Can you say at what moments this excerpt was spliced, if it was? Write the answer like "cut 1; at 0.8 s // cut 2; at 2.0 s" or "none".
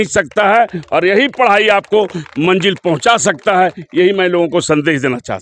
none

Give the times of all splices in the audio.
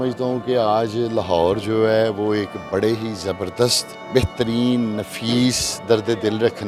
none

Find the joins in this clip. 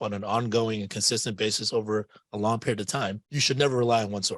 cut 1; at 3.3 s

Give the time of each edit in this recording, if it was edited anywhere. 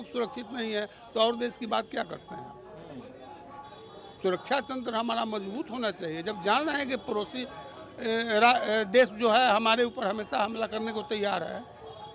none

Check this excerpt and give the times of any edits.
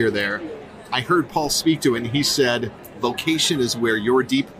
cut 1; at 2.8 s

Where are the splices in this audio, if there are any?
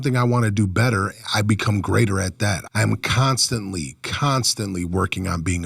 cut 1; at 2.6 s

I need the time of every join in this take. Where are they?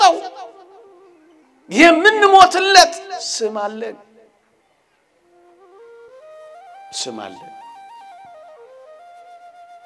none

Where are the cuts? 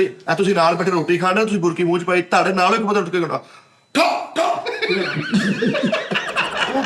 none

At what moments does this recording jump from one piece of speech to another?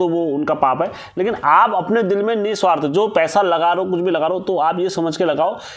none

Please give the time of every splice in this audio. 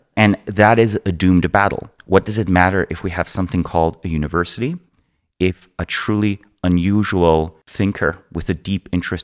cut 1; at 1.9 s // cut 2; at 7.6 s

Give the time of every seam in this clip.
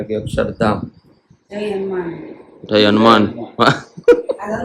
cut 1; at 1.4 s

